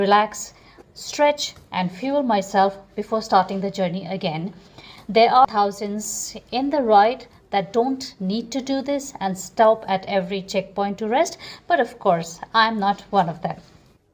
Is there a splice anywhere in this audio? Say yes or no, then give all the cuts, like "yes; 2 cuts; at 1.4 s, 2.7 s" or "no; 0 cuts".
no; 0 cuts